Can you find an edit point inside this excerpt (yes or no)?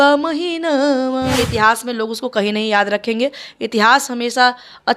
yes